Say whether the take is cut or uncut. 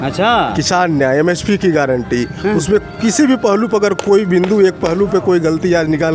uncut